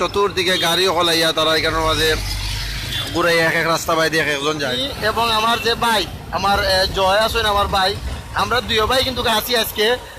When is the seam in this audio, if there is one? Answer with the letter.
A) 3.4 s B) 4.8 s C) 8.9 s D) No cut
B